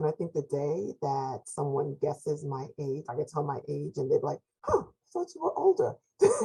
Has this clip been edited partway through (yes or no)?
no